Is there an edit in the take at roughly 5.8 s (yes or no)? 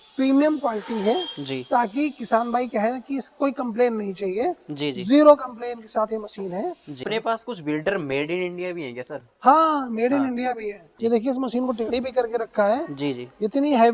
no